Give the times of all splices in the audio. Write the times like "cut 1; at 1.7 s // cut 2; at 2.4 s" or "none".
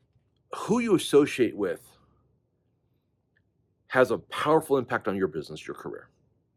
none